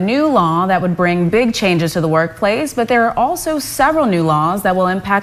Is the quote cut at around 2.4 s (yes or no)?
no